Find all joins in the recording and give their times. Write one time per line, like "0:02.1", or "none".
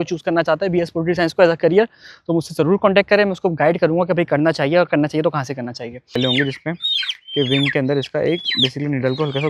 0:06.2

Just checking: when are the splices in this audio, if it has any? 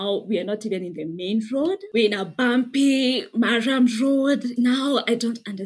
0:01.8
0:04.5

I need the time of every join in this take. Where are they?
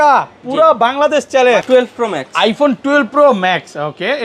0:01.6

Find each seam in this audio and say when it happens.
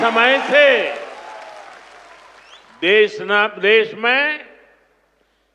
none

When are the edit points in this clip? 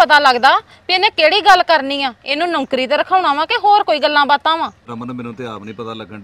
0:04.8

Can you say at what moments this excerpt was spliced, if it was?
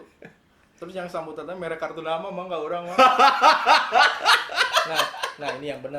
0:04.7

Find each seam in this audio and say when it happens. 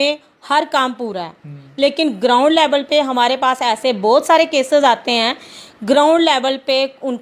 none

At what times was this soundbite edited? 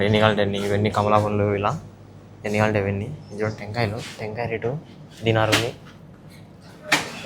none

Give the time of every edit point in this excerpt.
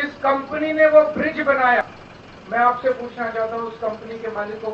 0:01.8

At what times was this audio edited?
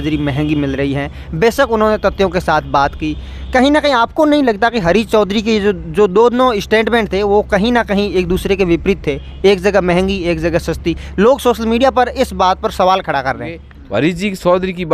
0:13.7

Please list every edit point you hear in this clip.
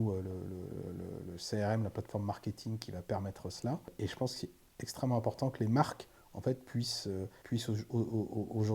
0:03.9
0:07.4

